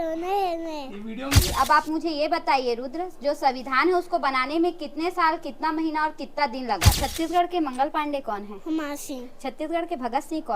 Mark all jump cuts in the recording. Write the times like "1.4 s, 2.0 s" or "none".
1.4 s, 6.9 s